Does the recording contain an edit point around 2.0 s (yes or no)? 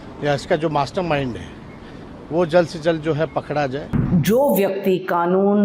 no